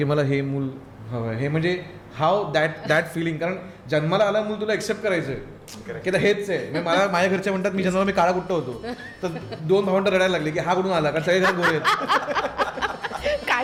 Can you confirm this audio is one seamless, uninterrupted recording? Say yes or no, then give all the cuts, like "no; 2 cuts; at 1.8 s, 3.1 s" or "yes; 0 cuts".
yes; 0 cuts